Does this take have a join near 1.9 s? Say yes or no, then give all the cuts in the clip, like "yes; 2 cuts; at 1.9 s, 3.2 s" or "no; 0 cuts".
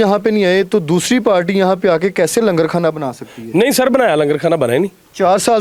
no; 0 cuts